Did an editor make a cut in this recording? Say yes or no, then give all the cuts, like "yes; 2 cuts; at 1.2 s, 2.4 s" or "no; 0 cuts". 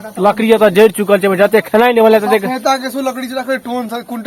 no; 0 cuts